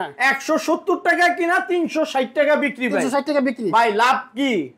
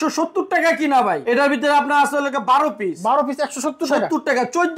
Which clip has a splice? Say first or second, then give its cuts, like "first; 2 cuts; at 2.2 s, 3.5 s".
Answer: second; 1 cut; at 1.2 s